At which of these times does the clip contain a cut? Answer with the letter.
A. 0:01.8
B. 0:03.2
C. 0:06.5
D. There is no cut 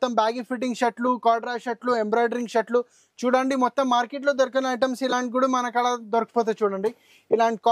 D